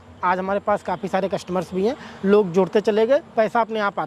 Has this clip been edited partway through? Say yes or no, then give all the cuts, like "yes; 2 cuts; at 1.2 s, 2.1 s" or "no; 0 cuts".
no; 0 cuts